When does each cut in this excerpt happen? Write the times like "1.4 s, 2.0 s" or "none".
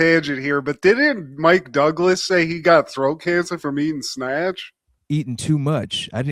none